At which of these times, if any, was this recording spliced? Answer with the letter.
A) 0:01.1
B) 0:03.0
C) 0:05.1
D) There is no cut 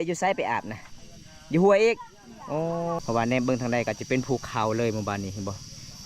B